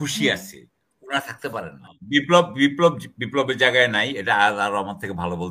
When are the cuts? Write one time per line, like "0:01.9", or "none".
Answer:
0:01.9